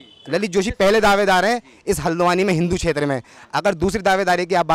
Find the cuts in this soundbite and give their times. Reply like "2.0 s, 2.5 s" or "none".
none